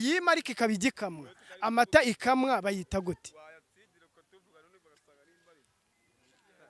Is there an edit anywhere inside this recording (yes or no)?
no